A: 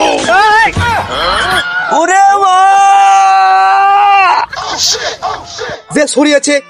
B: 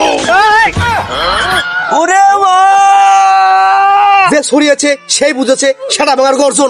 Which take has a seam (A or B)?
B